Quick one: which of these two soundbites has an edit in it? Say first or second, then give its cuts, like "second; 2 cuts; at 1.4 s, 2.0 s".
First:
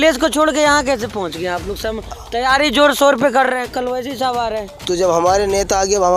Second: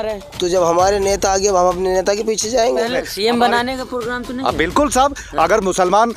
second; 1 cut; at 3.0 s